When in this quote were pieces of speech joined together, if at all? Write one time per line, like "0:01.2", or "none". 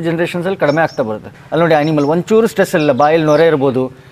0:01.4